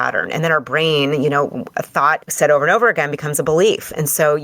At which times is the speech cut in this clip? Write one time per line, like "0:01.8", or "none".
0:02.3